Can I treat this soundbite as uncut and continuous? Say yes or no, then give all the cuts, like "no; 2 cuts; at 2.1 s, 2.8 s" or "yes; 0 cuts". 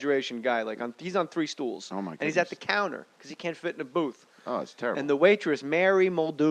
yes; 0 cuts